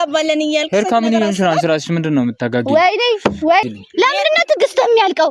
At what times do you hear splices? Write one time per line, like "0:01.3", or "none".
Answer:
0:03.6